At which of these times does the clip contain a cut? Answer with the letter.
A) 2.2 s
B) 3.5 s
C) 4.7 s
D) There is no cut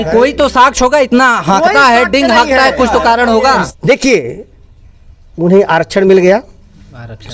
B